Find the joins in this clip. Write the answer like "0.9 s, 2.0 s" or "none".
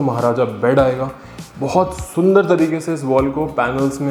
none